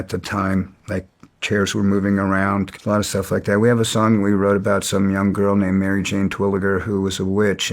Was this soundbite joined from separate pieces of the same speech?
yes; 1 cut; at 2.8 s

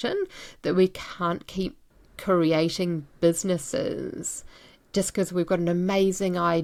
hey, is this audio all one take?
yes; 0 cuts

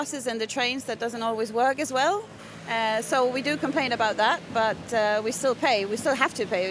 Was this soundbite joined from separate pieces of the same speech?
no; 0 cuts

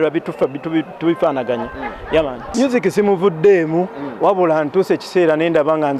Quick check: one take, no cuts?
no; 1 cut; at 2.4 s

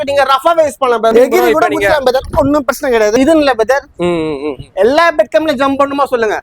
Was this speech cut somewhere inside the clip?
yes; 2 cuts; at 1.1 s, 3.1 s

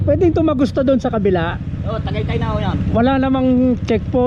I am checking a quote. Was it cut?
no; 0 cuts

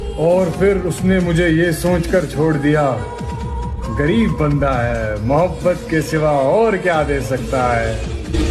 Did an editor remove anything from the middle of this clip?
no; 0 cuts

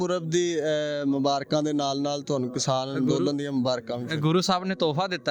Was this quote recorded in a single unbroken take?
yes; 0 cuts

